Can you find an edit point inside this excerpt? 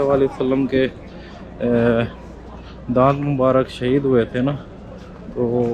no; 0 cuts

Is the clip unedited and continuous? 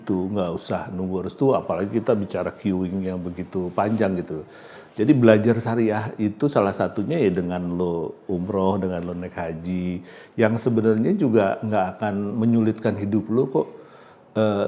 yes; 0 cuts

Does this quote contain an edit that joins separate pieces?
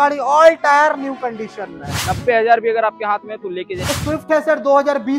yes; 2 cuts; at 1.9 s, 3.8 s

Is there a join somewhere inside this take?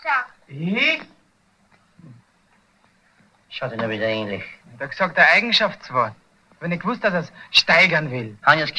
yes; 1 cut; at 2.7 s

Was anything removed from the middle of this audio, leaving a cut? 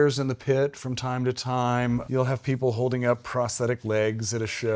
no; 0 cuts

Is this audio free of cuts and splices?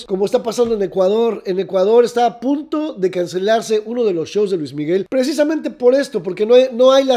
yes; 0 cuts

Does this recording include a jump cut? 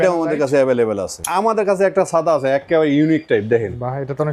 yes; 1 cut; at 1.1 s

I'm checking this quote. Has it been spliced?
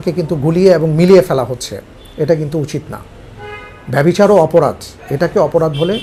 no; 0 cuts

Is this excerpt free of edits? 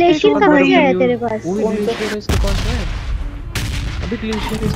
yes; 0 cuts

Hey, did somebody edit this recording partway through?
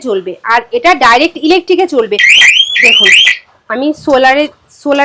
yes; 1 cut; at 2.3 s

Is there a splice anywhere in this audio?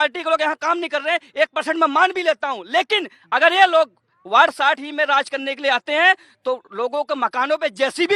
no; 0 cuts

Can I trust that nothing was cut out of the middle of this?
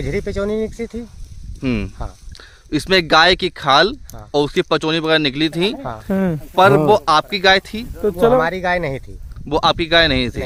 yes; 0 cuts

